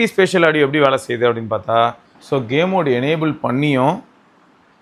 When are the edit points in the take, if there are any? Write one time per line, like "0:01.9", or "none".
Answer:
0:02.1